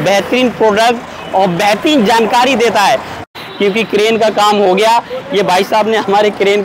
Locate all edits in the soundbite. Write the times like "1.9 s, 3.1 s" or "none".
3.3 s